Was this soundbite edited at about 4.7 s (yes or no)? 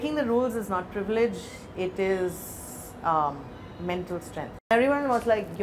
yes